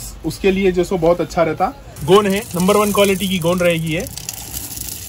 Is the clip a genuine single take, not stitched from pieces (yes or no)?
no